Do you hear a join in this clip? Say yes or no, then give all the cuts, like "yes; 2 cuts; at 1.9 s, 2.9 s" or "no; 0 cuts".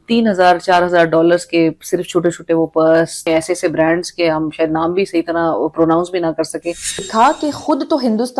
yes; 2 cuts; at 3.3 s, 7.0 s